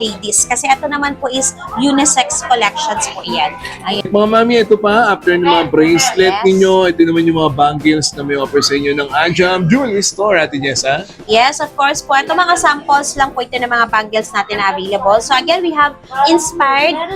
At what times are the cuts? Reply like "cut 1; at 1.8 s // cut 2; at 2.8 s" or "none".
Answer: cut 1; at 4.0 s